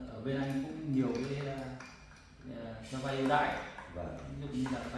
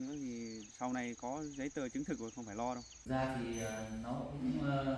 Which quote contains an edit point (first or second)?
second